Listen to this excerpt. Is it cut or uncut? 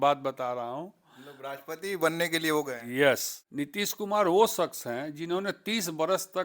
cut